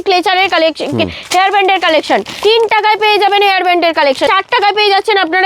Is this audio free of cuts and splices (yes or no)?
no